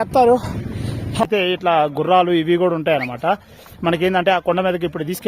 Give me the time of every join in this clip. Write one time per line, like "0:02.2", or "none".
0:01.2